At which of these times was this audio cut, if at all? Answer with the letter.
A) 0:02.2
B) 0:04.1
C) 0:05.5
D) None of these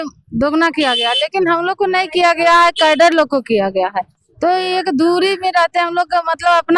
D